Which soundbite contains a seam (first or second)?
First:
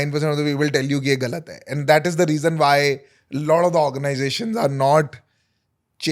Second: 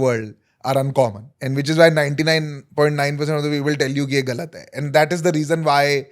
second